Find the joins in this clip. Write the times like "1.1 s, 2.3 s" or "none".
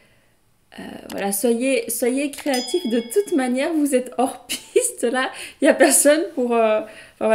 none